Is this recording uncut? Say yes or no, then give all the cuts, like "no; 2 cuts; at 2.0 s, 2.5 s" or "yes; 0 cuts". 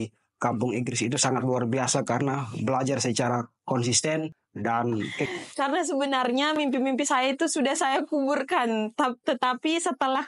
no; 2 cuts; at 4.4 s, 5.3 s